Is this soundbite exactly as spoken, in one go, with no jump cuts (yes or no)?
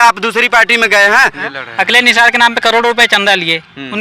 no